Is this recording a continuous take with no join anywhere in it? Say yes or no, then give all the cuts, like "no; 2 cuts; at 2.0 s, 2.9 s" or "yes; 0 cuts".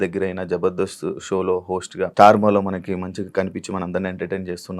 no; 1 cut; at 2.1 s